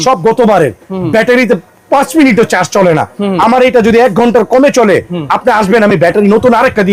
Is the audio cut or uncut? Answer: uncut